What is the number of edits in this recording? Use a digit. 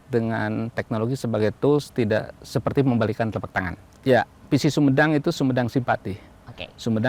1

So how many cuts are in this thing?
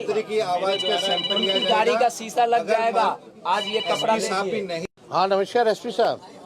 1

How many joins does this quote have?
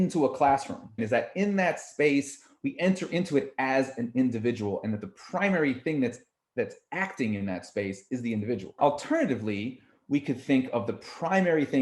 2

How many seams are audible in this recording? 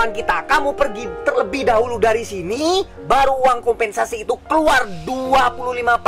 0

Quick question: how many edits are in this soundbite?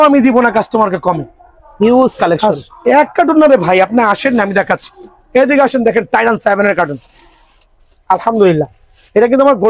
0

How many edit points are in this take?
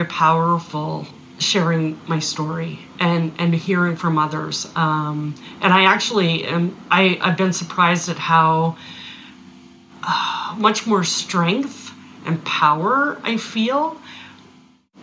1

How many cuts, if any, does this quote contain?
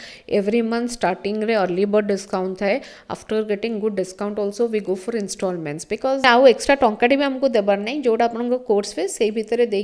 1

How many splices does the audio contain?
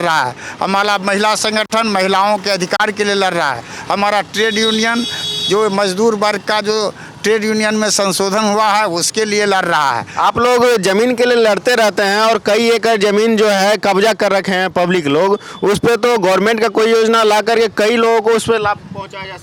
0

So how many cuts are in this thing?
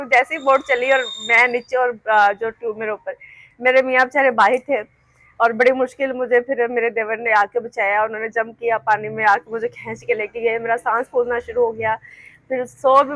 0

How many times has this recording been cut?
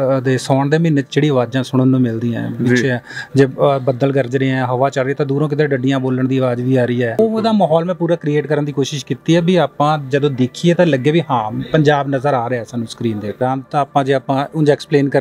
2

